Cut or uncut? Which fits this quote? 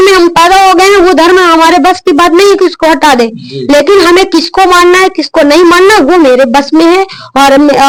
uncut